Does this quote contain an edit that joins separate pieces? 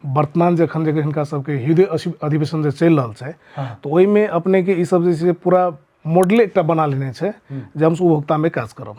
no; 0 cuts

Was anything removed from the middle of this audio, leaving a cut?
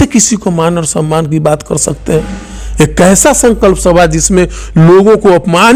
no; 0 cuts

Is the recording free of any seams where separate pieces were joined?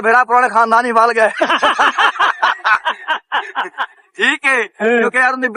yes; 0 cuts

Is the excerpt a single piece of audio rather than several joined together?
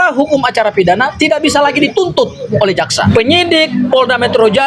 no; 1 cut; at 3.1 s

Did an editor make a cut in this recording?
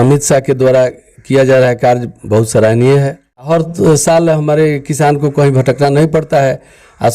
yes; 1 cut; at 3.5 s

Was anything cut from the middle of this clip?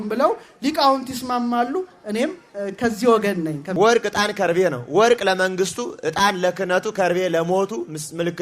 yes; 1 cut; at 3.7 s

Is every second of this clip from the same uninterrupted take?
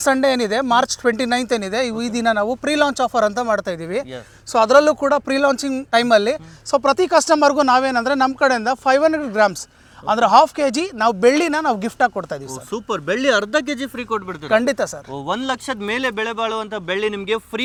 yes; 0 cuts

